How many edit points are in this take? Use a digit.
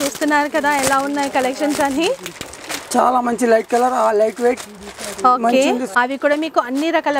1